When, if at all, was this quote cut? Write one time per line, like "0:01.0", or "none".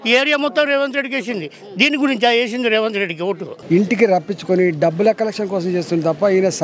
0:03.5